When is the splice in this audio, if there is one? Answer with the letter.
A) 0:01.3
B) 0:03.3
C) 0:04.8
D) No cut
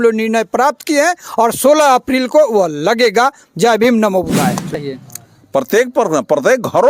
C